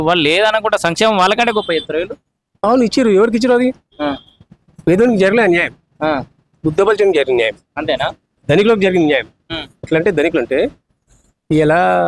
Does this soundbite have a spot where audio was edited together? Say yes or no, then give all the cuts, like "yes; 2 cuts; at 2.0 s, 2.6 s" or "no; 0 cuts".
no; 0 cuts